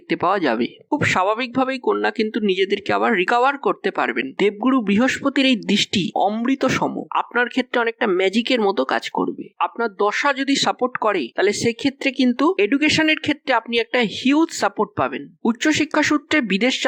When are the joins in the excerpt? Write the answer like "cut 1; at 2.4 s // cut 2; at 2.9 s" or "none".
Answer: none